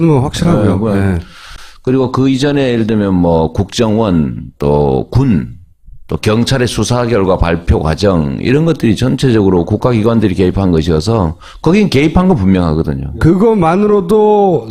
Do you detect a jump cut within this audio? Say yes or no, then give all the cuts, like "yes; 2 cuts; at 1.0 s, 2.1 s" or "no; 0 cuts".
yes; 1 cut; at 12.9 s